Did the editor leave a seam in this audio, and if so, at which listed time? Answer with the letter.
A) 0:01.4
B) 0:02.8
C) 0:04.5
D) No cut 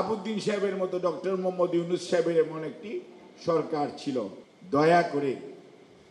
C